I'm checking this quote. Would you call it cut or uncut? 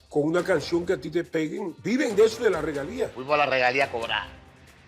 cut